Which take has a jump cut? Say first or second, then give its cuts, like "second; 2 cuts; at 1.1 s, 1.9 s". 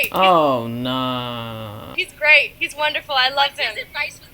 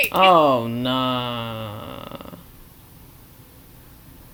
first; 1 cut; at 2.1 s